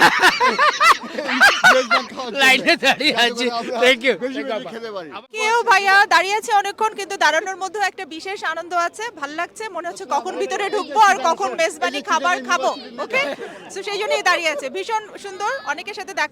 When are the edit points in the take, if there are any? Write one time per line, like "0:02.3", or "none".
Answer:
none